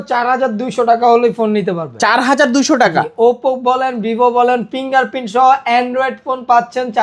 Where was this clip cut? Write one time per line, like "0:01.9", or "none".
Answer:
none